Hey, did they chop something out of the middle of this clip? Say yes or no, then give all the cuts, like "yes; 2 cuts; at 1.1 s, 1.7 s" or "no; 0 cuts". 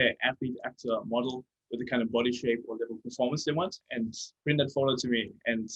yes; 1 cut; at 3.8 s